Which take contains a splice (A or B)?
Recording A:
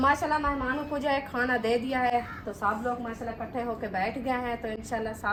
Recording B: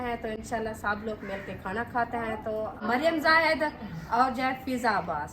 B